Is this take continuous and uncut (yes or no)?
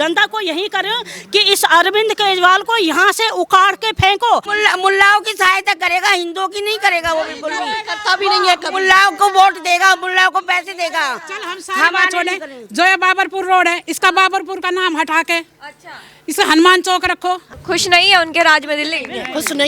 no